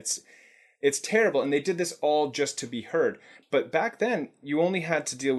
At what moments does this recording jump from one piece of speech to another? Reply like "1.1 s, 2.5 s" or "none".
3.3 s